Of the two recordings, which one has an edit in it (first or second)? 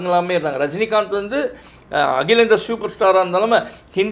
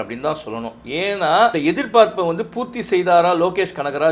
second